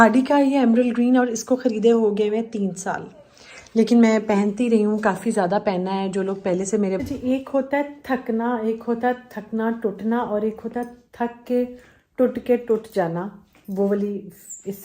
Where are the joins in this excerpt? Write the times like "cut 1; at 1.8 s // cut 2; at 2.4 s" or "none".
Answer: cut 1; at 7.0 s